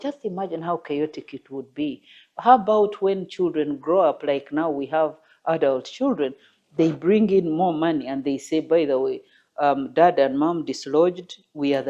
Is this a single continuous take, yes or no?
yes